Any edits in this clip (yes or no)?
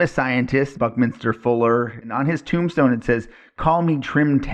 yes